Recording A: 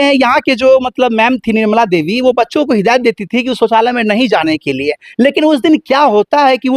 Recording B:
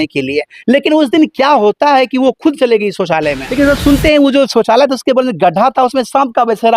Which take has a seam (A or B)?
B